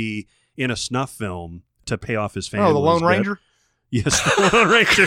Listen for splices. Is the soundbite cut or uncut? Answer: cut